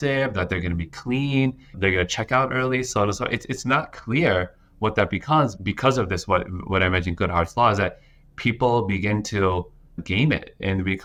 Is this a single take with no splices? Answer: yes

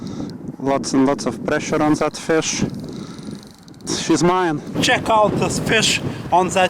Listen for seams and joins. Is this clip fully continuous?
no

